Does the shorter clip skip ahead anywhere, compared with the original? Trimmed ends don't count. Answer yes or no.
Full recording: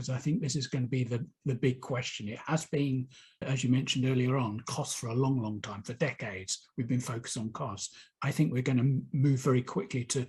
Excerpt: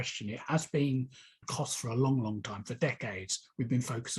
yes